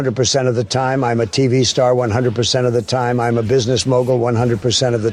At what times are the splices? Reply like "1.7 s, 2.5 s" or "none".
none